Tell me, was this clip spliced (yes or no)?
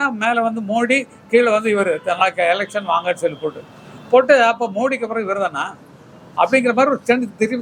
no